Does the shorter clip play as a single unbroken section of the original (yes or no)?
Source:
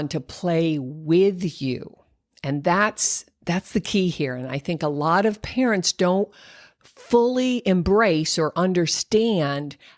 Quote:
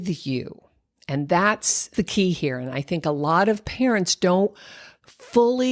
no